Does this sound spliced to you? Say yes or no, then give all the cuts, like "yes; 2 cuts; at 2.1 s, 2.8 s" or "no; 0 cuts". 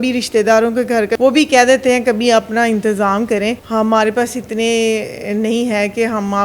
yes; 2 cuts; at 1.1 s, 3.6 s